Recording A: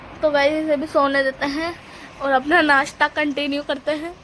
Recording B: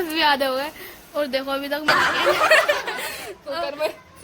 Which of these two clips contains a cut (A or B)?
B